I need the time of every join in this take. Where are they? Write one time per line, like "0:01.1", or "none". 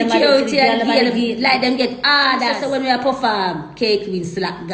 0:02.5